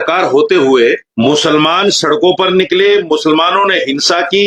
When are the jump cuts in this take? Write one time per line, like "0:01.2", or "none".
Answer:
none